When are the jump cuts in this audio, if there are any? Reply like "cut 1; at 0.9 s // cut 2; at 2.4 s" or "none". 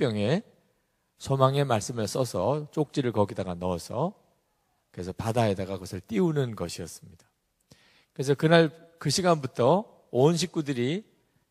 cut 1; at 1.1 s